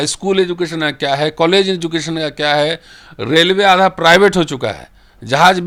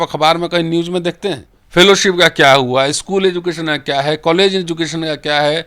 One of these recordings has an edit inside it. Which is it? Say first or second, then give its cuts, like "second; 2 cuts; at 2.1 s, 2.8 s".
second; 1 cut; at 1.5 s